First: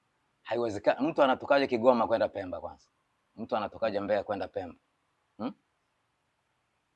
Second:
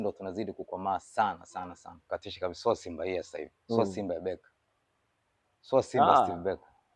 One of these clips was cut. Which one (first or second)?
second